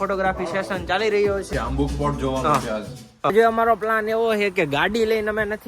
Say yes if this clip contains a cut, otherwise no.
yes